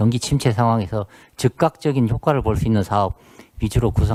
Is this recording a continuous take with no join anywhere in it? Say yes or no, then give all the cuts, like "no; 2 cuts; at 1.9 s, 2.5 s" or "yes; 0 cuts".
yes; 0 cuts